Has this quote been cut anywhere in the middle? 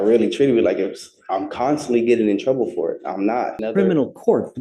yes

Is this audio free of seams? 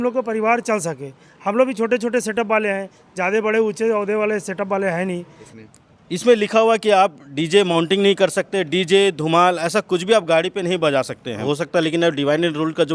no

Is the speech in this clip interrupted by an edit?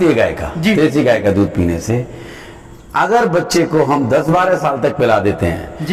no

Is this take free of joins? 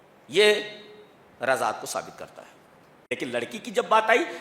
no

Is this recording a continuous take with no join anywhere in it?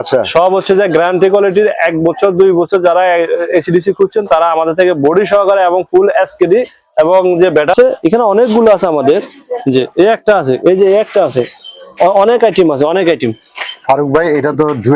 no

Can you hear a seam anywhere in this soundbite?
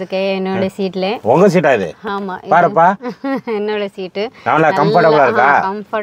no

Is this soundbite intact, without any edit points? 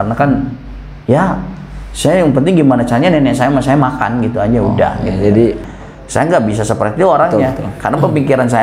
no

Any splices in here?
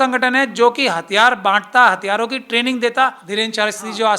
yes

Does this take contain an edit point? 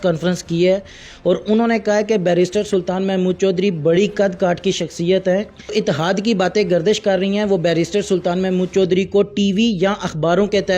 yes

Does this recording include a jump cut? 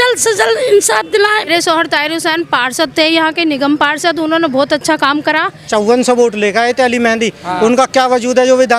yes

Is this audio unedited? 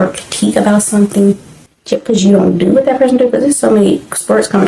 yes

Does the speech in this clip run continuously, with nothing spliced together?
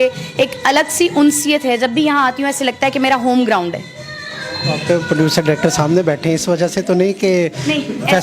yes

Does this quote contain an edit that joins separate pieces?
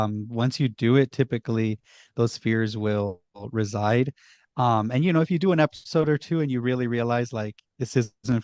no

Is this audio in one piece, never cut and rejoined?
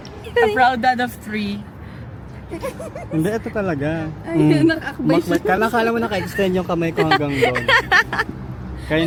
yes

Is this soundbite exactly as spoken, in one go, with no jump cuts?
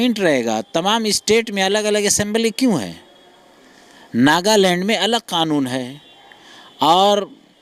yes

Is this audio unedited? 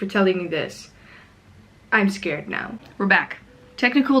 no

